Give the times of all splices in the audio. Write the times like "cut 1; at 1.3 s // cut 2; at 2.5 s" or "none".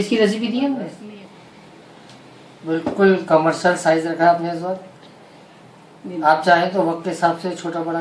cut 1; at 1.0 s